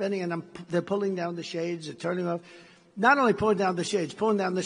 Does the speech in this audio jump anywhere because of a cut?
yes; 1 cut; at 3.2 s

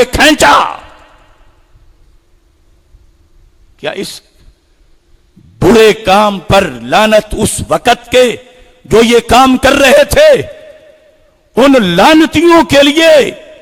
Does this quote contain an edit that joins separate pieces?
no; 0 cuts

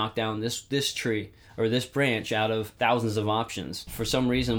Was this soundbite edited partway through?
no; 0 cuts

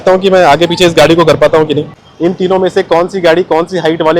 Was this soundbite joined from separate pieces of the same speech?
yes; 1 cut; at 2.0 s

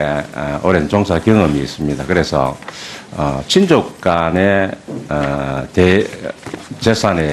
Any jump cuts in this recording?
no; 0 cuts

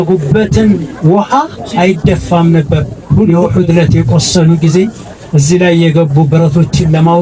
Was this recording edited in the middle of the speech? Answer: yes; 1 cut; at 3.3 s

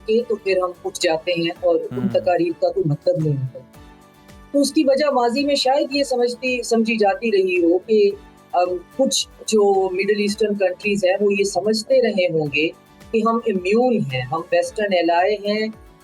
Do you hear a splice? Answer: no; 0 cuts

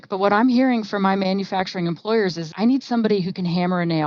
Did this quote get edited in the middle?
yes; 1 cut; at 2.5 s

